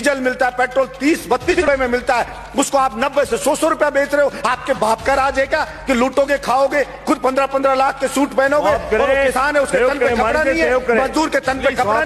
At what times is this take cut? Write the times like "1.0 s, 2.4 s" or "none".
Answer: 1.5 s